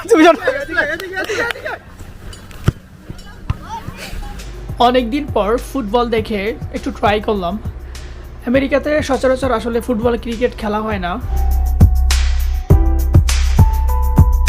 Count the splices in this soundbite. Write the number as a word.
two